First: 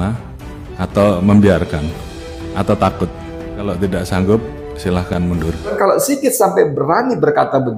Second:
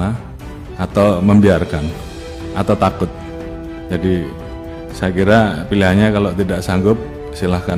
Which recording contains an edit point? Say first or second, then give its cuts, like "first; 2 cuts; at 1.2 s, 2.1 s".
first; 2 cuts; at 3.7 s, 5.7 s